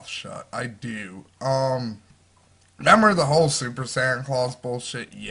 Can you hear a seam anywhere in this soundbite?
yes; 1 cut; at 3.8 s

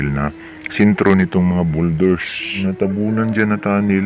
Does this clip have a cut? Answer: yes; 1 cut; at 2.6 s

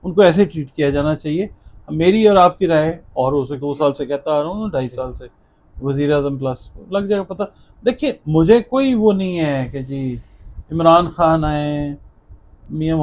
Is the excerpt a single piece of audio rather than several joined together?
no; 1 cut; at 3.6 s

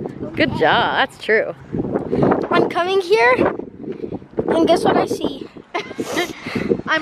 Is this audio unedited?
no; 1 cut; at 2.1 s

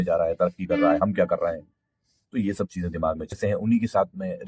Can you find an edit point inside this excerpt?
yes; 1 cut; at 3.4 s

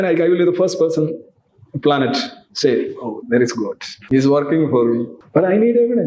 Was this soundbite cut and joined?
yes; 2 cuts; at 3.9 s, 5.2 s

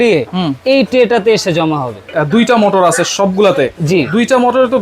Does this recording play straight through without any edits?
no; 1 cut; at 2.0 s

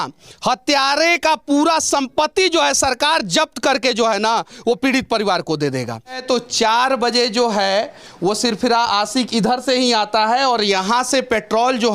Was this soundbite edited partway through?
yes; 1 cut; at 6.2 s

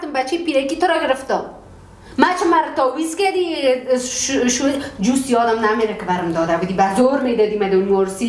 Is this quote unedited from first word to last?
yes; 0 cuts

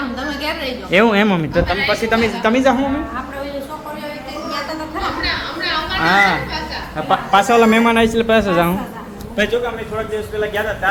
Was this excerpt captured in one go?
yes; 0 cuts

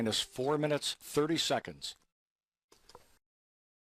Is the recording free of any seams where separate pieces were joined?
yes; 0 cuts

